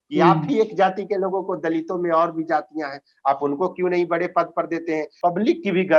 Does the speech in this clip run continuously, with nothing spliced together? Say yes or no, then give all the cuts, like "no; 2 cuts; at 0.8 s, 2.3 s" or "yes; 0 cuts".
no; 1 cut; at 5.1 s